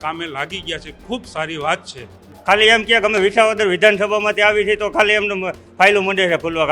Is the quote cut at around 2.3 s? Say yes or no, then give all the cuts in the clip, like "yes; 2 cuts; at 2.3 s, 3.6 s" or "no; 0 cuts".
yes; 1 cut; at 2.3 s